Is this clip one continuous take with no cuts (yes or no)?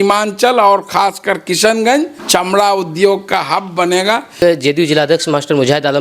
no